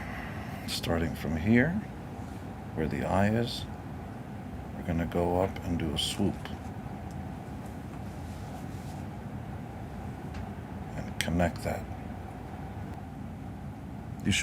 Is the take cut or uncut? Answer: cut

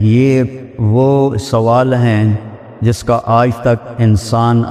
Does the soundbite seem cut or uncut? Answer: uncut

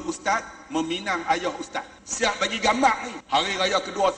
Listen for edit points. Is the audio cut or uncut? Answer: cut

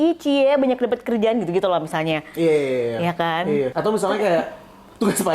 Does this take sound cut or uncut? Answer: cut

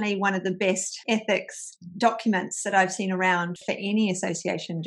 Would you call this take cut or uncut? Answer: cut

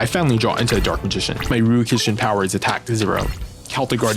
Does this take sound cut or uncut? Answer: cut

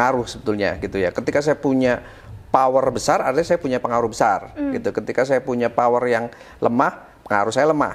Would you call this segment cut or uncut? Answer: uncut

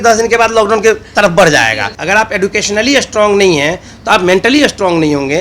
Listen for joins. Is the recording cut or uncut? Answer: cut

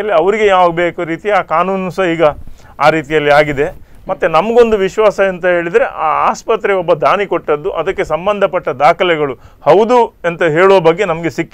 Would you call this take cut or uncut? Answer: uncut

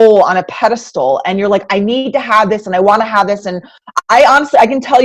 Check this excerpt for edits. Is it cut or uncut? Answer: uncut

